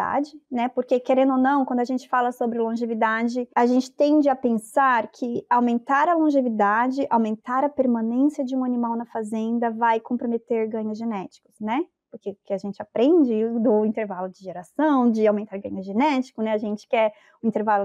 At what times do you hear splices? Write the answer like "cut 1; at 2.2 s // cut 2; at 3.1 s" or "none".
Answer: cut 1; at 3.5 s